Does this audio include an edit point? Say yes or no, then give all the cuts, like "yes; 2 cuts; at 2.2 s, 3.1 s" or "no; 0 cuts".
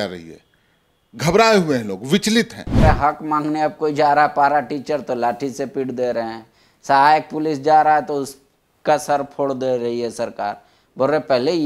yes; 1 cut; at 2.8 s